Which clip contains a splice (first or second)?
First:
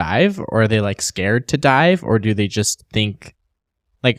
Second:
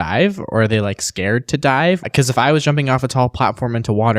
second